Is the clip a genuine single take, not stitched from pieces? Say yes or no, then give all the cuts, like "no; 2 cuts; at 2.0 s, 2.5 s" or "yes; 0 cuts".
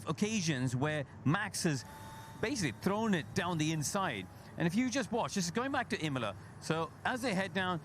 no; 2 cuts; at 1.4 s, 6.9 s